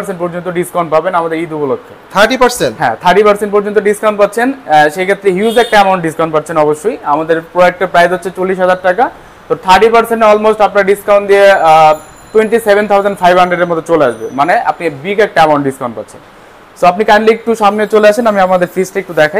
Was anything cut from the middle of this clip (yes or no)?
no